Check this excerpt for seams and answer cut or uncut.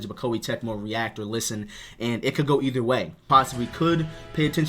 cut